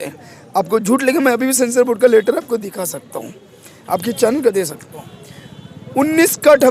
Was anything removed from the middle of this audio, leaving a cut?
no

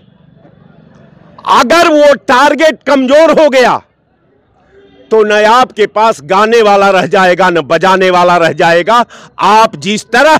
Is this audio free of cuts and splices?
yes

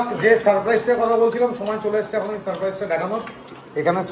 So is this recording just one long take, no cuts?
yes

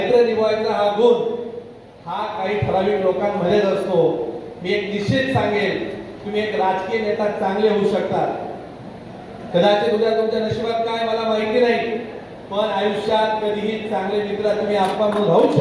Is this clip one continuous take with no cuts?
yes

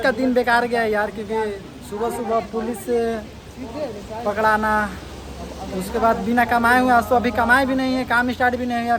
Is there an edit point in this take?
no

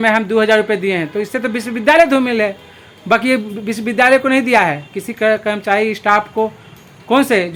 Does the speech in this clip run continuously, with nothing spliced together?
yes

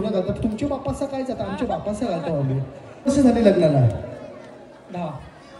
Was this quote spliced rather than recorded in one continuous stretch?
yes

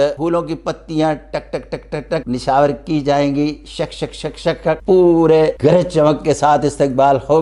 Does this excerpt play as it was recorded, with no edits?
yes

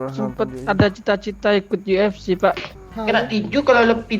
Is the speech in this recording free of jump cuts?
no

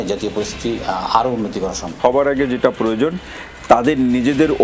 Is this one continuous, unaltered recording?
no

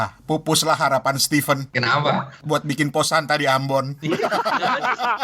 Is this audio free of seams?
no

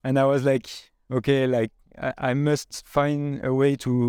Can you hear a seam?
no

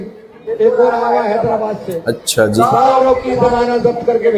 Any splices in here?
no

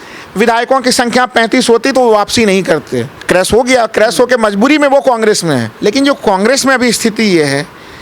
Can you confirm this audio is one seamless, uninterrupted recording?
no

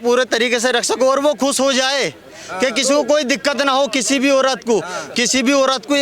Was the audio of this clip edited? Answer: no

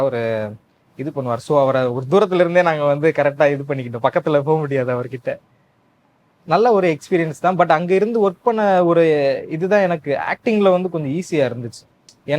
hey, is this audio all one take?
yes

